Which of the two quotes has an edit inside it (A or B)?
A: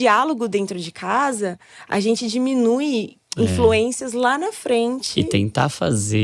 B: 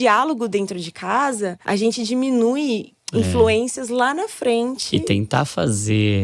B